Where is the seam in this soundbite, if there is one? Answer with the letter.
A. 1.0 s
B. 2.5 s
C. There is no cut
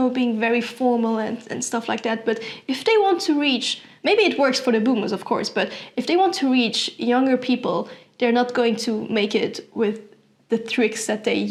C